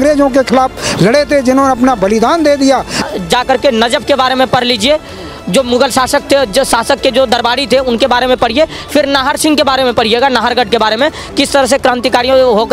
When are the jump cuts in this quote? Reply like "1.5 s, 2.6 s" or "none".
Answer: 3.0 s